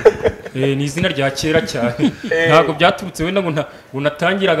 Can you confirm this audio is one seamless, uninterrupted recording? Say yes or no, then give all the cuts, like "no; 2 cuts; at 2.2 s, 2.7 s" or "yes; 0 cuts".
yes; 0 cuts